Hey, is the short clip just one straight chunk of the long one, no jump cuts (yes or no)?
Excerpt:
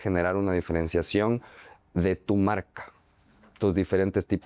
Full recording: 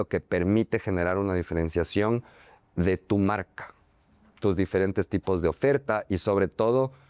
yes